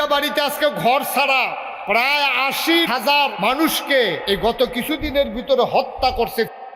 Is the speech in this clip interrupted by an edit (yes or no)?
yes